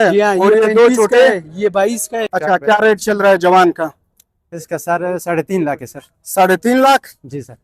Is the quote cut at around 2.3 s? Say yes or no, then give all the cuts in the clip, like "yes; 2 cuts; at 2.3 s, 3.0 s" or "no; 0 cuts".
yes; 1 cut; at 2.3 s